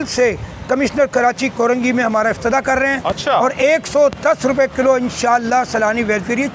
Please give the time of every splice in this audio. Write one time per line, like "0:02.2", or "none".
none